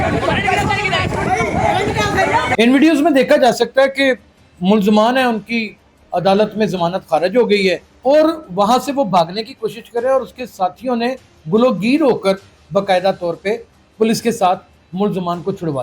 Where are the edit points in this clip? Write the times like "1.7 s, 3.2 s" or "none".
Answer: 2.5 s